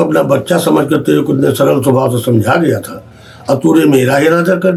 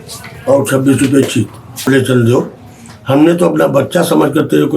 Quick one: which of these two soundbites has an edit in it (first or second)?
second